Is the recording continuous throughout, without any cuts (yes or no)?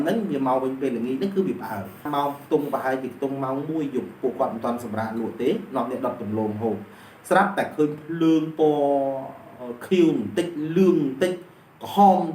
no